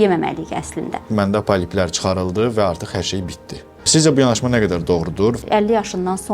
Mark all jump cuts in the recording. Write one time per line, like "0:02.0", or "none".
0:01.1
0:03.9
0:05.4